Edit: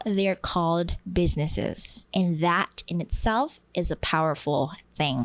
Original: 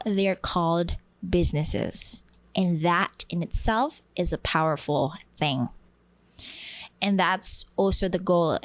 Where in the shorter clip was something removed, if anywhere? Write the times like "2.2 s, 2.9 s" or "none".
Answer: 1.0 s, 1.9 s